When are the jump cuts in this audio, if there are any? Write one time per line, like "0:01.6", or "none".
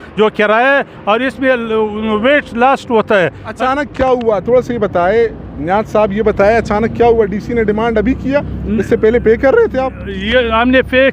none